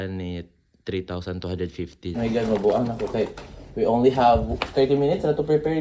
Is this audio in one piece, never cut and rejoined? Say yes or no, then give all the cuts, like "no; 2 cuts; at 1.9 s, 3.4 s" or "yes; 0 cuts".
no; 1 cut; at 2.1 s